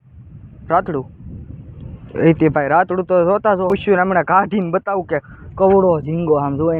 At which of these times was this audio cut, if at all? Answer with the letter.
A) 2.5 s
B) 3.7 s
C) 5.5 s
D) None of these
B